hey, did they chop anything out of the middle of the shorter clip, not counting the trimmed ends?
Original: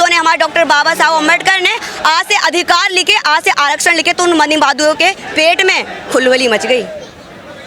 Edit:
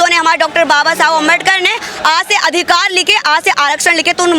no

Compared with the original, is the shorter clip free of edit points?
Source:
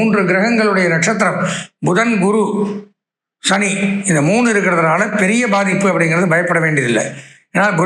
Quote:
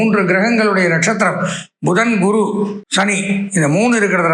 no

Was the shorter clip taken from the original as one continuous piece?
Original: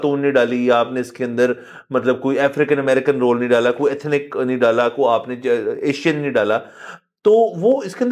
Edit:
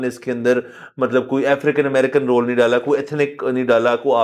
yes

